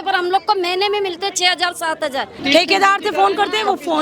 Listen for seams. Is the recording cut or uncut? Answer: cut